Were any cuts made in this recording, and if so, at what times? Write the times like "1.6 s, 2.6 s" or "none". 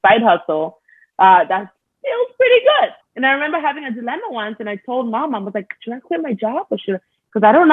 3.0 s

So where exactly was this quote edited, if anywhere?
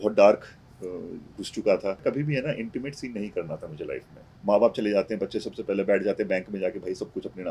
2.0 s, 4.2 s

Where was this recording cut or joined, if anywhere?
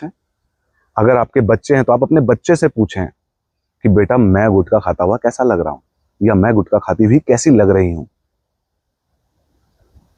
none

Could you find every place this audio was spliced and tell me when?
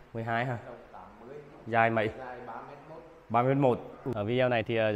4.0 s

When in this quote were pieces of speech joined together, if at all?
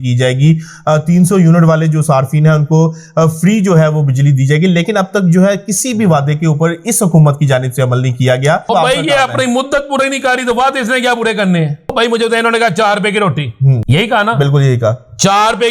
8.7 s, 11.9 s, 13.8 s

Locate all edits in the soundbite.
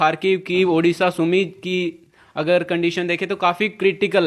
none

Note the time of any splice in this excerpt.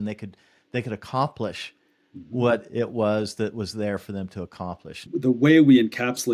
5.0 s

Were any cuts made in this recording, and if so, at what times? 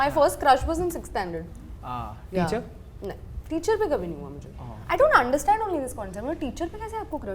none

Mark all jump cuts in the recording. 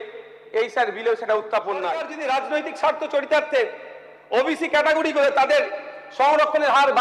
2.1 s

